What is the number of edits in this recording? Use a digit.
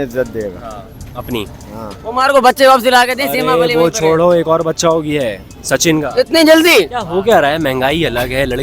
2